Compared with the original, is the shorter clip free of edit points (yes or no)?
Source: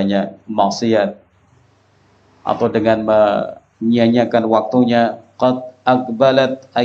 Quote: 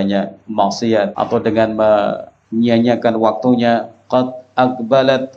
no